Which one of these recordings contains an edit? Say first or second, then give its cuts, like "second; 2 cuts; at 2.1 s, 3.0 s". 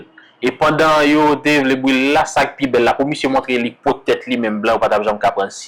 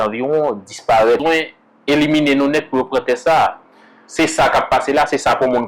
second; 1 cut; at 1.2 s